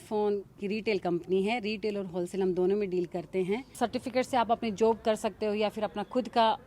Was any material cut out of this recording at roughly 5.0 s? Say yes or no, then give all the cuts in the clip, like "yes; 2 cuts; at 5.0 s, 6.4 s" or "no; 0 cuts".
no; 1 cut; at 3.7 s